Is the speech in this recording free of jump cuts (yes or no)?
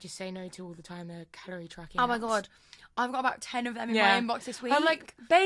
yes